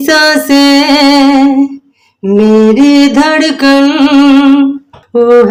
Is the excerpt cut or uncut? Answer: uncut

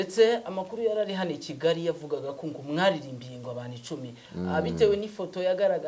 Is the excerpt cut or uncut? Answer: uncut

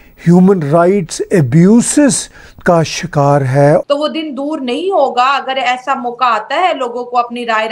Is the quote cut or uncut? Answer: cut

